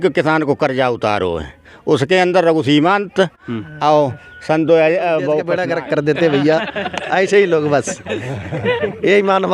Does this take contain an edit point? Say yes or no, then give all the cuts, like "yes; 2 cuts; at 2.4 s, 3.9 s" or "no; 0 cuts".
yes; 1 cut; at 5.6 s